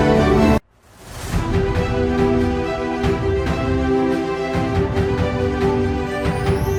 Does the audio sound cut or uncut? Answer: uncut